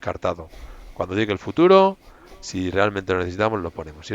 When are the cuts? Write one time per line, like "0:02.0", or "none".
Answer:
none